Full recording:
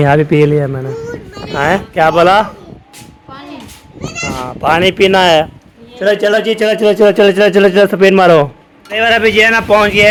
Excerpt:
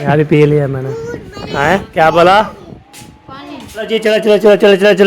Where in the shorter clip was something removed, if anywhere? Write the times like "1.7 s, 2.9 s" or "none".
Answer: 3.9 s